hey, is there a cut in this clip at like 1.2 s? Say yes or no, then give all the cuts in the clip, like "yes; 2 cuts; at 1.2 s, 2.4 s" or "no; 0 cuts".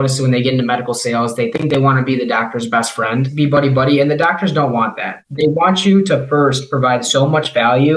no; 2 cuts; at 3.3 s, 5.2 s